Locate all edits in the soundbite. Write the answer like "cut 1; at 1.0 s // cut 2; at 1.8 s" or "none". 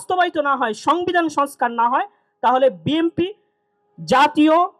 none